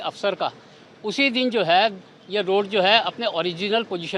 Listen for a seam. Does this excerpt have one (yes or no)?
no